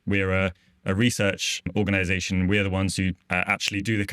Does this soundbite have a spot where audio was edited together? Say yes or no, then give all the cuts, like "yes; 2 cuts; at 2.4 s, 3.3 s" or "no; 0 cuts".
yes; 1 cut; at 3.2 s